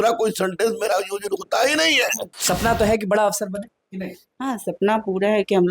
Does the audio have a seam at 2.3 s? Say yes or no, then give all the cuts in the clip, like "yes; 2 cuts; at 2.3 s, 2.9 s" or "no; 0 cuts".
yes; 1 cut; at 2.3 s